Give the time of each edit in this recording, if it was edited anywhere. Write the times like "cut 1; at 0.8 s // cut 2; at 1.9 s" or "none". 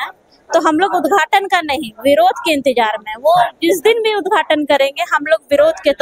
none